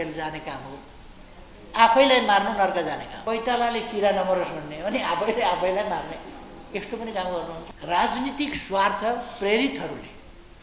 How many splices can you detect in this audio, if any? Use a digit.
2